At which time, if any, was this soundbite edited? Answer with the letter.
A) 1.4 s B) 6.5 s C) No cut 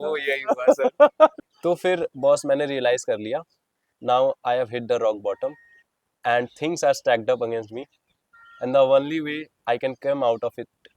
A